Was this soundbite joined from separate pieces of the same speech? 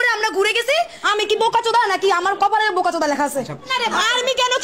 yes; 2 cuts; at 1.0 s, 3.7 s

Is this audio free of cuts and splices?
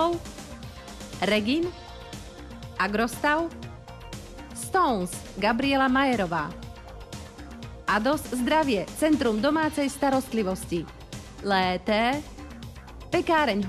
yes; 0 cuts

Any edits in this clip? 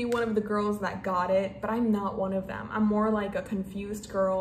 no; 0 cuts

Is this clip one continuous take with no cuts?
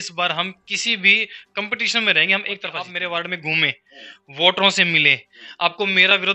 no; 1 cut; at 2.8 s

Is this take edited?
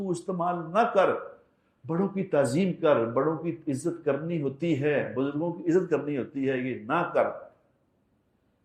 no; 0 cuts

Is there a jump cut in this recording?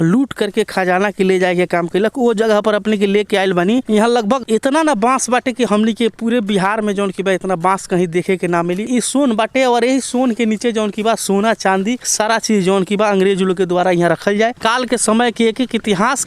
yes; 2 cuts; at 8.8 s, 14.6 s

